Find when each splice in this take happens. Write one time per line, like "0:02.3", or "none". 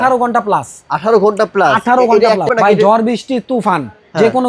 0:02.5